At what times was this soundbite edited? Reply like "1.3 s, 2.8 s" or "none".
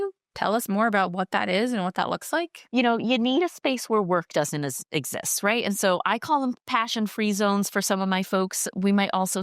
2.7 s

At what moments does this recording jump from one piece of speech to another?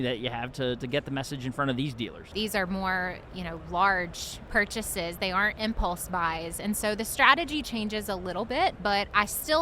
2.2 s, 4.5 s, 8.8 s

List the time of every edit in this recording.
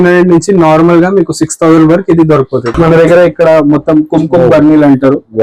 2.7 s

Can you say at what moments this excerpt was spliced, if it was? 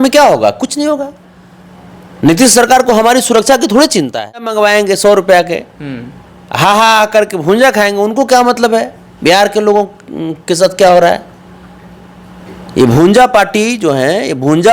4.3 s

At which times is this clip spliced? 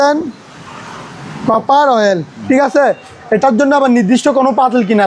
2.3 s

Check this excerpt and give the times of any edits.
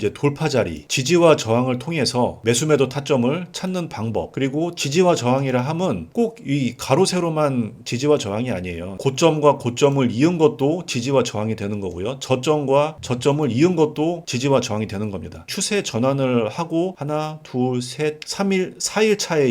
0.9 s, 2.4 s, 15.5 s

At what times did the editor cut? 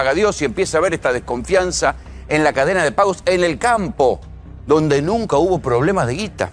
none

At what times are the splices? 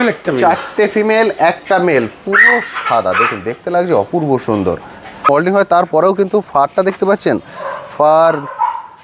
5.3 s

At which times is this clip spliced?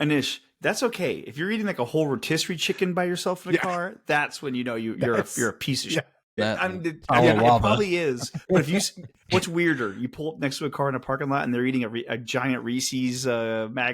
6.2 s

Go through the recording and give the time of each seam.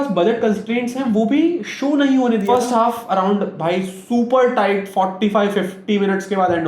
2.4 s

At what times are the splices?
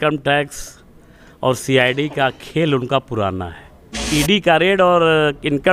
4.1 s

